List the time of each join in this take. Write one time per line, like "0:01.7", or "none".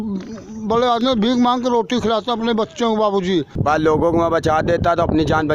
0:03.5